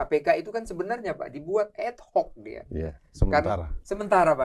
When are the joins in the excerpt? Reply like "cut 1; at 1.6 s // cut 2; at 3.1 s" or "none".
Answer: none

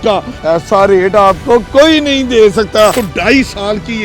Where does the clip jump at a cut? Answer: cut 1; at 2.9 s

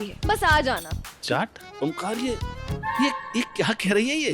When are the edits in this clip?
cut 1; at 1.7 s

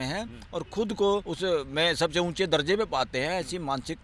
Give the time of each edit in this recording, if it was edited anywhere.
cut 1; at 1.3 s

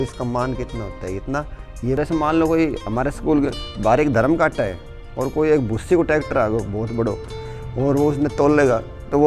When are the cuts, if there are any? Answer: cut 1; at 2.0 s

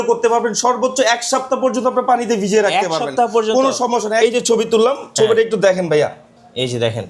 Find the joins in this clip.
cut 1; at 4.2 s

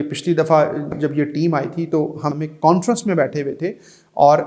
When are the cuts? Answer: cut 1; at 2.3 s

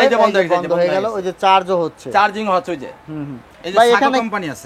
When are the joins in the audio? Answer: cut 1; at 3.5 s

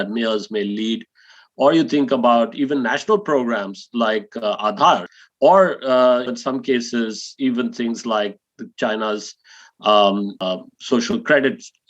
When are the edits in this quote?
cut 1; at 5.1 s // cut 2; at 6.3 s // cut 3; at 10.4 s

